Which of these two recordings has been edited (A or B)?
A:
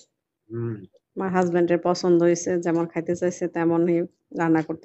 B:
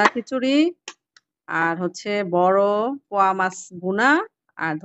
A